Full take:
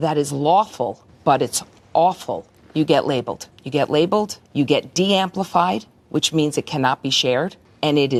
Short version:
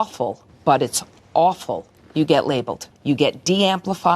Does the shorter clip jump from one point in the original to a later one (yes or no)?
yes